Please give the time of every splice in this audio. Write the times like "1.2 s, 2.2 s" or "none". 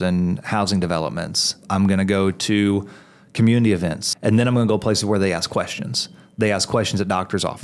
1.6 s, 4.0 s